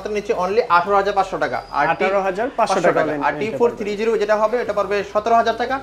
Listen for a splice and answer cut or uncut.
uncut